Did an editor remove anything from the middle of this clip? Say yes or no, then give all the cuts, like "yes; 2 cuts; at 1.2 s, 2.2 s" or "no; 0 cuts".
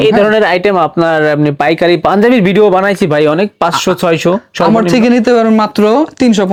no; 0 cuts